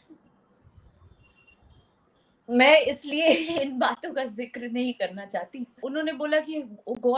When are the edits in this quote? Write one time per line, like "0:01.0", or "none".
0:05.7